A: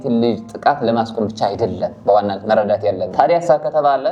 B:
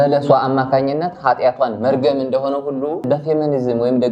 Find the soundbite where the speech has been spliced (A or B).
A